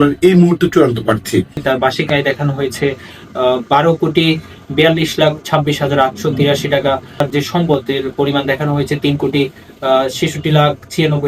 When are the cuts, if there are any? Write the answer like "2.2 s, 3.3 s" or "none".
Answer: 1.6 s, 7.2 s